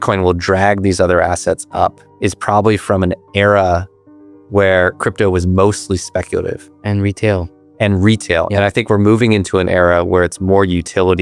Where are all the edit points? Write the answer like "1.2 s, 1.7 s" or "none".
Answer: 2.0 s